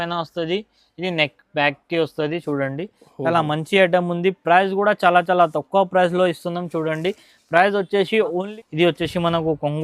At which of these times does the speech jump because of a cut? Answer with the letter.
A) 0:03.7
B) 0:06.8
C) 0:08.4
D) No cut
C